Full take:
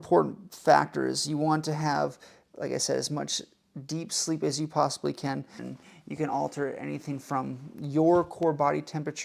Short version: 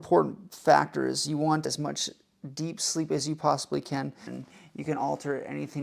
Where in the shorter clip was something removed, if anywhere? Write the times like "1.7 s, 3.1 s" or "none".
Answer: 1.7 s